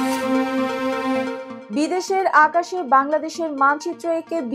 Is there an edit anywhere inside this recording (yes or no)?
yes